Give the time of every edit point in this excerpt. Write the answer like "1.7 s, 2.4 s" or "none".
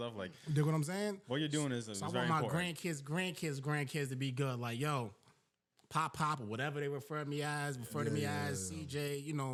none

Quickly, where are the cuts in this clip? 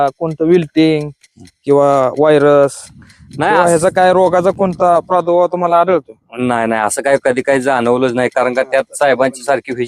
none

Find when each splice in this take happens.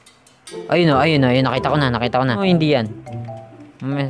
2.4 s

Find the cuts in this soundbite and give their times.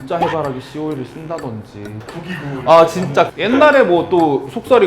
2.0 s, 3.4 s

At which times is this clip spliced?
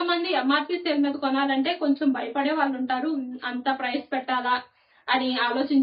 none

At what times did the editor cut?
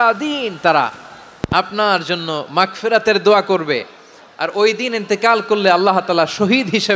none

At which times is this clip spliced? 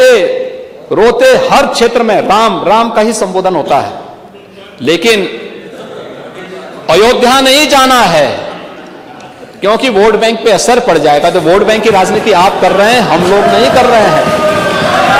none

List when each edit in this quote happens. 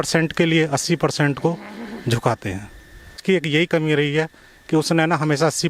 none

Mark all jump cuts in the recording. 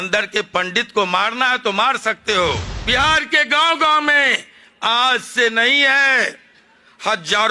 2.7 s

